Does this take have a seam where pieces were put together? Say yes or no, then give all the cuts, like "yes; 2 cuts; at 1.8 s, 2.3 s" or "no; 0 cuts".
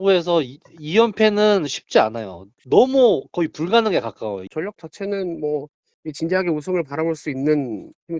yes; 1 cut; at 4.5 s